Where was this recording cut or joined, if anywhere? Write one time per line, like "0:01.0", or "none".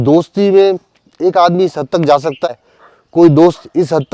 0:02.5